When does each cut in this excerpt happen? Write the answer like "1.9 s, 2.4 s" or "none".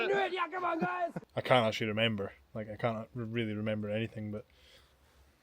1.2 s, 4.6 s